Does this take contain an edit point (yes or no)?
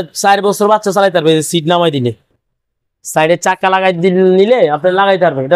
no